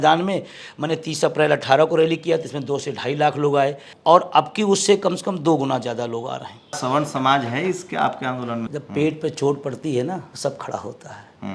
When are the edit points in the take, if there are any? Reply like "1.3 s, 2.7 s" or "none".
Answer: 3.9 s, 6.8 s, 8.6 s, 10.3 s